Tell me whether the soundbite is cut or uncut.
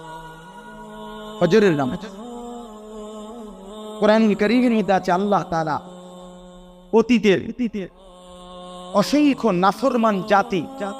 cut